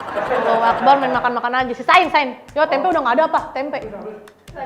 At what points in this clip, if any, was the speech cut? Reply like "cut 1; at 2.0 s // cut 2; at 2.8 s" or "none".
none